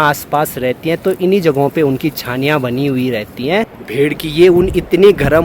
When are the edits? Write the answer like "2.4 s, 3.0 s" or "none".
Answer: 3.8 s